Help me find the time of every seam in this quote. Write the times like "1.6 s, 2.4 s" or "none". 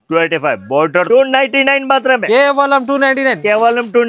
1.1 s